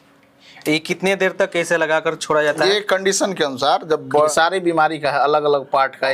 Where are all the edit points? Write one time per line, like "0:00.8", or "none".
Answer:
0:04.3